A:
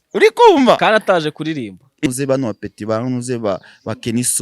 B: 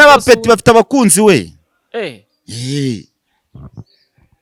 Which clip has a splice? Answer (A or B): A